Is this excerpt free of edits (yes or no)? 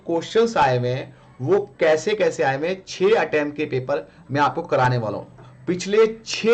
yes